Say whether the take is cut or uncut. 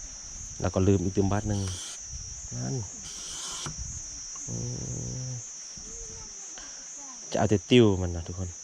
uncut